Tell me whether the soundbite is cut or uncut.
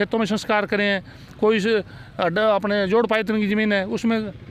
uncut